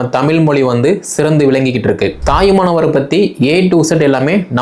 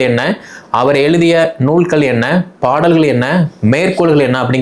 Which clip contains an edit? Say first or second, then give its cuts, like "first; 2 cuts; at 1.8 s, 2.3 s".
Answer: first; 1 cut; at 2.2 s